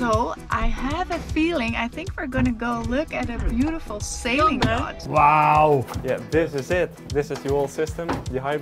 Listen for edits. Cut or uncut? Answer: cut